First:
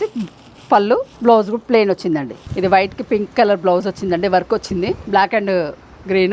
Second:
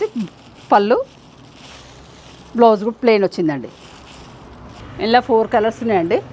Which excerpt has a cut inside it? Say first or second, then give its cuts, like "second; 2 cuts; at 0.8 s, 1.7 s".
first; 3 cuts; at 1.1 s, 2.4 s, 5.0 s